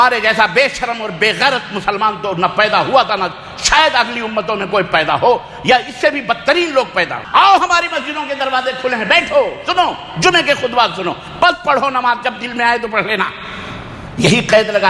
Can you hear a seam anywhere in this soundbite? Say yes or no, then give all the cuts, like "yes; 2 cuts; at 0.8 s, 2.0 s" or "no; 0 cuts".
yes; 1 cut; at 7.2 s